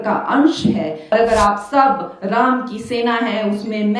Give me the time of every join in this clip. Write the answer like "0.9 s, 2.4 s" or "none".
1.1 s